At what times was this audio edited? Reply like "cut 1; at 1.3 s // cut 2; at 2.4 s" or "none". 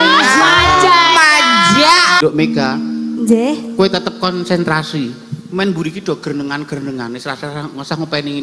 cut 1; at 2.2 s